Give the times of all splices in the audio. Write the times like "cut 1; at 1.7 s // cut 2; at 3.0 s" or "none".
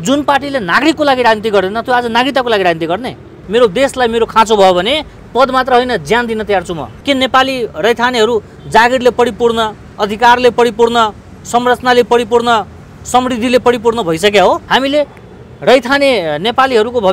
cut 1; at 3.3 s // cut 2; at 6.9 s // cut 3; at 14.6 s

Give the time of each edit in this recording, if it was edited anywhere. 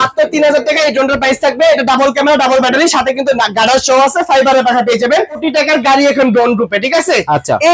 cut 1; at 5.4 s

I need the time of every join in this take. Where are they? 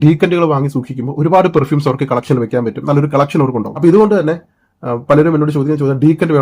cut 1; at 3.7 s

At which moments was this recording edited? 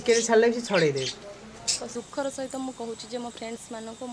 cut 1; at 1.9 s

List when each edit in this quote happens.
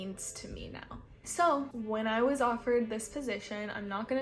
none

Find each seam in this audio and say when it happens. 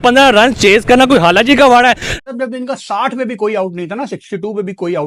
cut 1; at 2.1 s

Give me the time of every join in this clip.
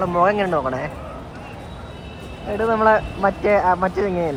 none

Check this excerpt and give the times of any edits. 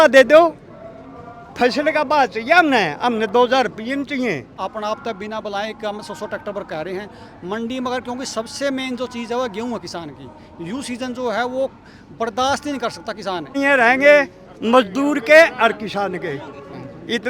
cut 1; at 4.6 s // cut 2; at 13.5 s

